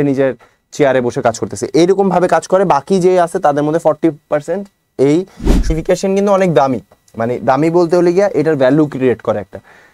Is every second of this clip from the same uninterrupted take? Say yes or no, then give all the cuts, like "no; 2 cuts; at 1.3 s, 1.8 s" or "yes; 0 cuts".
no; 1 cut; at 5.7 s